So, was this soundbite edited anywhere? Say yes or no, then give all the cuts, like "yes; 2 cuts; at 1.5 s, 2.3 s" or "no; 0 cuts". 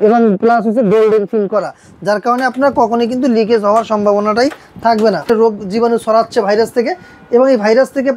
yes; 1 cut; at 5.3 s